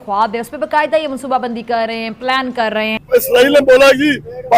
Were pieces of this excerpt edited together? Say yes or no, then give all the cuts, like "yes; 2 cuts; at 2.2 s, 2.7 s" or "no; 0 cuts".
yes; 1 cut; at 3.0 s